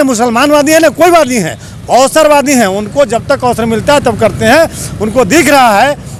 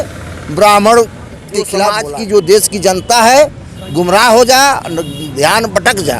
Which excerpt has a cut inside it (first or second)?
second